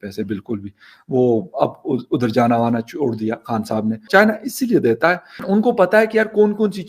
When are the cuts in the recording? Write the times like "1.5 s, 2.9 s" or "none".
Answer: 4.1 s, 5.4 s